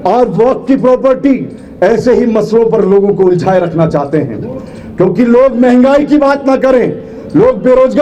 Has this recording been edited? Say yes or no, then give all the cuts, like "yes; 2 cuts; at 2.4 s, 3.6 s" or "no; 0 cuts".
no; 0 cuts